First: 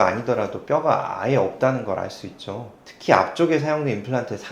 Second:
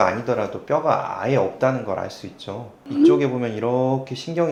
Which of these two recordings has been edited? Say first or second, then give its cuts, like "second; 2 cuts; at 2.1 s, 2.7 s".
first; 1 cut; at 2.8 s